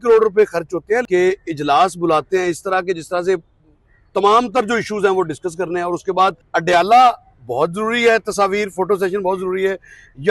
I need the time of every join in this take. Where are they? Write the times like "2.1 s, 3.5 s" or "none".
1.0 s, 6.4 s